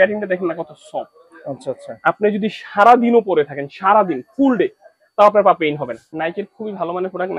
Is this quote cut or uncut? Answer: cut